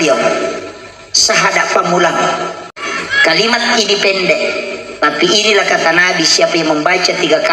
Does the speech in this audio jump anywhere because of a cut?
yes; 1 cut; at 2.6 s

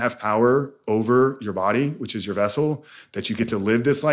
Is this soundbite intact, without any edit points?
yes; 0 cuts

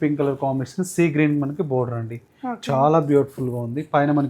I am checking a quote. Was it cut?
no; 0 cuts

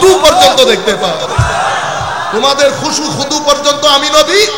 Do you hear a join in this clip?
no; 0 cuts

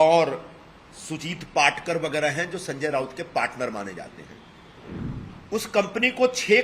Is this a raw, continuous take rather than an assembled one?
no; 1 cut; at 4.8 s

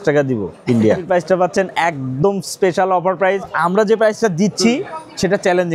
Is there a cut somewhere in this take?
yes; 2 cuts; at 1.1 s, 3.5 s

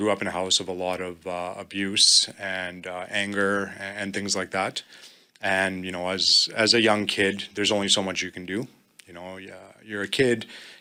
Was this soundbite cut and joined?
no; 0 cuts

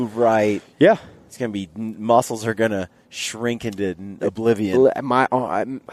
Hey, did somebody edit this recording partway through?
no; 0 cuts

